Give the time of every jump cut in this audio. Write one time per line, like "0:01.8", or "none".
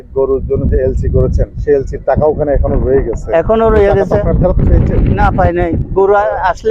none